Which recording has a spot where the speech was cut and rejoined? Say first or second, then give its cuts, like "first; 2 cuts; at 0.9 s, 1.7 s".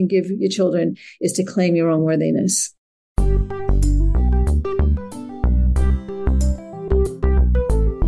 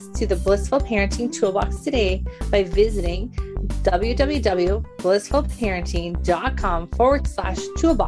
first; 1 cut; at 3.0 s